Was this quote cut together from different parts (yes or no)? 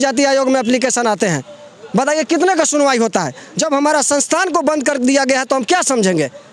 no